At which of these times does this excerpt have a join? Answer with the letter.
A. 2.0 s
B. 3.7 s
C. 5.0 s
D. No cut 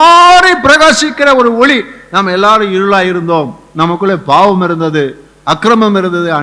D